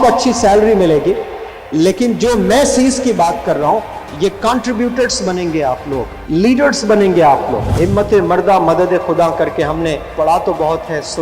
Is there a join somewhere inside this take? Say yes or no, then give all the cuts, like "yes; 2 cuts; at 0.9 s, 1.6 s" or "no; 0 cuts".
yes; 2 cuts; at 6.1 s, 7.6 s